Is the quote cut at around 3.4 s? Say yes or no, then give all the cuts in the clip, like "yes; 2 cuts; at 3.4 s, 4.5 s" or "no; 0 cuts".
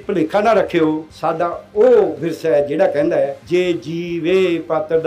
yes; 2 cuts; at 1.1 s, 3.4 s